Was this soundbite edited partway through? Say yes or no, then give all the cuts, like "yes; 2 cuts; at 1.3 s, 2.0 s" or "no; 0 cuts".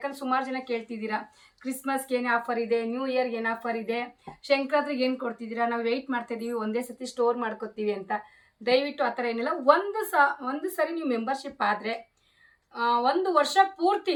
no; 0 cuts